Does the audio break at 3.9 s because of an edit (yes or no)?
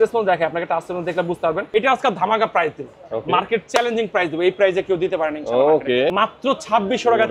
no